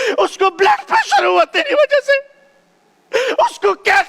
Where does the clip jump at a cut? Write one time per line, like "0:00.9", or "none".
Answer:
none